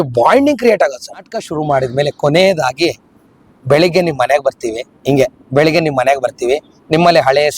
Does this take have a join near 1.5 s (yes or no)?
yes